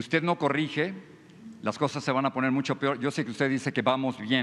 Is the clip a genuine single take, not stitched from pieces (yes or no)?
yes